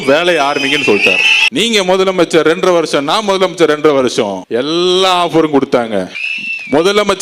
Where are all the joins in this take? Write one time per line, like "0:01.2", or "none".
0:01.5
0:06.1